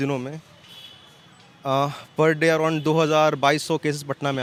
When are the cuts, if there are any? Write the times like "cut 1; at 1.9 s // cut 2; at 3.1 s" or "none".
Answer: none